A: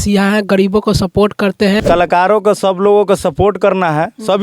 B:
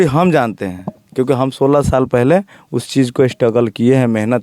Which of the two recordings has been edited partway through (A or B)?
A